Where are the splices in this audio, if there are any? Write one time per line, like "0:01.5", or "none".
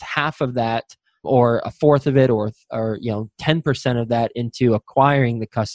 none